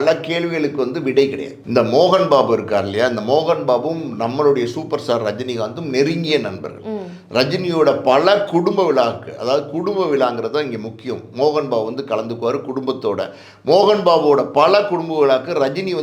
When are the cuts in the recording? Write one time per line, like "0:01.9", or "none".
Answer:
0:01.7